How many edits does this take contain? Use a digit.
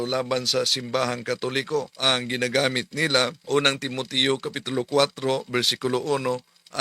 2